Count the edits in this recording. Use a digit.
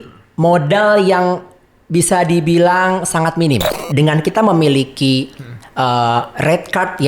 1